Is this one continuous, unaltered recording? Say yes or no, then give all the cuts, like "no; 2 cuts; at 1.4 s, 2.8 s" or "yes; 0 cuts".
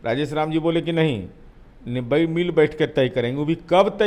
yes; 0 cuts